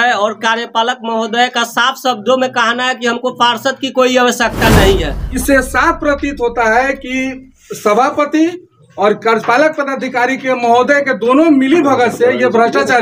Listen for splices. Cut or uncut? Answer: cut